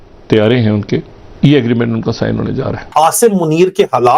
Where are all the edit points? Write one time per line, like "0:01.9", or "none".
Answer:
0:01.2
0:02.8

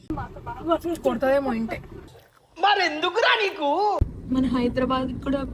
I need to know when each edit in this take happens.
0:04.1

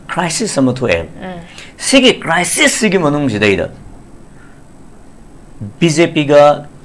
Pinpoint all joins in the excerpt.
none

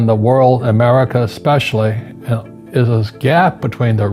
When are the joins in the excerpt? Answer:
none

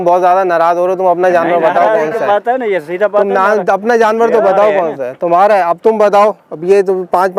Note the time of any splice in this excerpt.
none

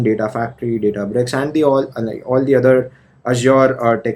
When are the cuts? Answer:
none

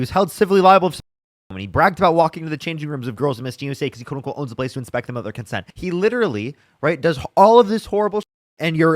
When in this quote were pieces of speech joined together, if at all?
0:05.6

